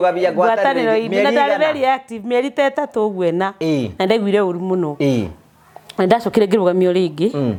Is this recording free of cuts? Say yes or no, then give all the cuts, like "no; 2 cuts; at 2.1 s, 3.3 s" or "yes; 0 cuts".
yes; 0 cuts